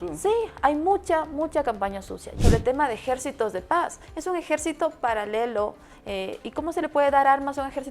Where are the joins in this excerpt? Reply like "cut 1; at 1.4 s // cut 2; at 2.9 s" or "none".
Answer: cut 1; at 2.2 s